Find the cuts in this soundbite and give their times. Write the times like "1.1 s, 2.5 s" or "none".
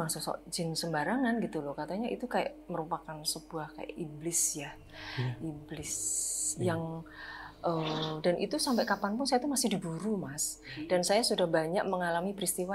none